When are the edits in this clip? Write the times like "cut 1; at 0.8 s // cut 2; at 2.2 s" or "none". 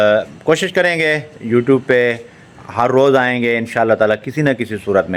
none